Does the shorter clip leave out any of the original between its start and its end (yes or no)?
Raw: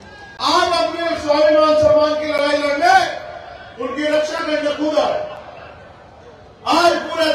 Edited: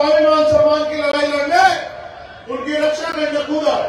no